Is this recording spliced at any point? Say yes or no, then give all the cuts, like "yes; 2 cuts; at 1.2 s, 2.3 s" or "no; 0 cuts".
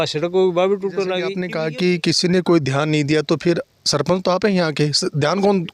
yes; 1 cut; at 1.4 s